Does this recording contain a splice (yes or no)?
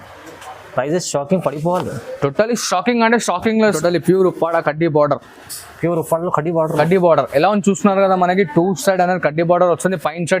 yes